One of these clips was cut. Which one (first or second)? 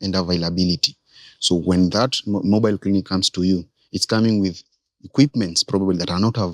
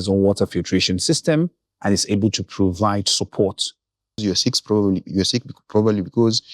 second